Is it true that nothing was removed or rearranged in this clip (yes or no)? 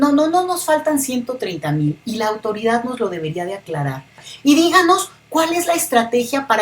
no